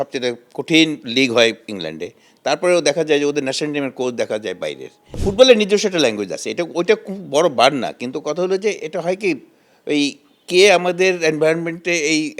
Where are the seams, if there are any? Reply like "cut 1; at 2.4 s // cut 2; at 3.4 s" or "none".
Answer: cut 1; at 5.2 s